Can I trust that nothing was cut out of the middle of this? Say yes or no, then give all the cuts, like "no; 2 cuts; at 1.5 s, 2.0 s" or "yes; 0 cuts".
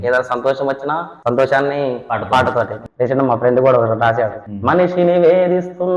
no; 1 cut; at 2.8 s